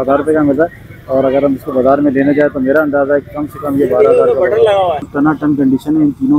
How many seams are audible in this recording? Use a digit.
1